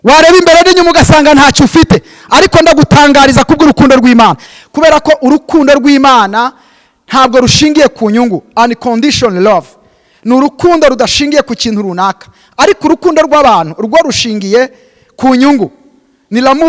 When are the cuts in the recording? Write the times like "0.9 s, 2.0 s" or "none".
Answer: 4.5 s